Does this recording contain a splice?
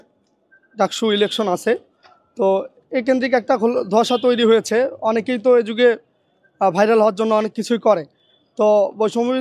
no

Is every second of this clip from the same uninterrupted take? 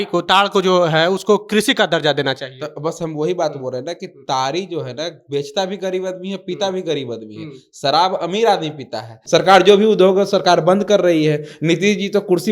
no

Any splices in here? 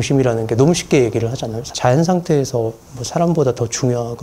yes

